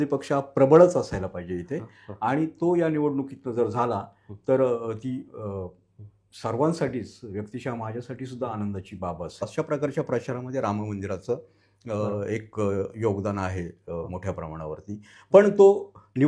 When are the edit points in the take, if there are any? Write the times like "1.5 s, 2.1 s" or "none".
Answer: 9.4 s